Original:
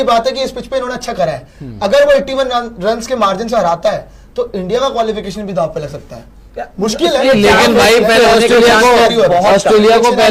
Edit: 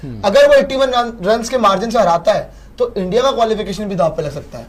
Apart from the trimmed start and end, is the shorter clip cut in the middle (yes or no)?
no